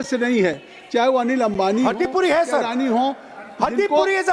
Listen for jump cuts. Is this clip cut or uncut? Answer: uncut